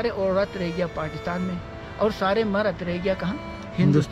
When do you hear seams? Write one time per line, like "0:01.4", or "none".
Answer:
none